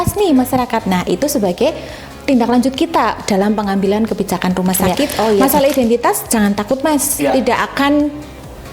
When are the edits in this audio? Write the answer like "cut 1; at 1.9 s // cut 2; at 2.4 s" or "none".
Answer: cut 1; at 5.4 s